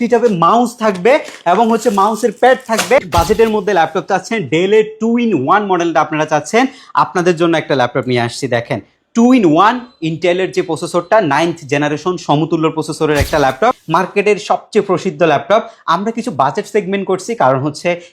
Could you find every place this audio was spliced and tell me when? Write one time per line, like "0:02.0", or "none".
0:03.0
0:13.8